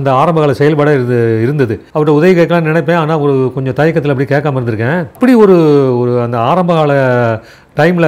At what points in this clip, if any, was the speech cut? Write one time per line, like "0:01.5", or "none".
0:01.8
0:05.1